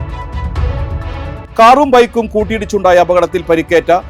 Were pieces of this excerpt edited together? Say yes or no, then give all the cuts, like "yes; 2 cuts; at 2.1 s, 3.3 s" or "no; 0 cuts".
no; 0 cuts